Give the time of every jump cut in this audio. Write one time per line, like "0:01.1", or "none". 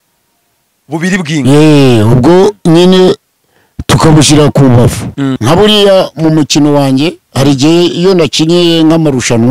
0:05.3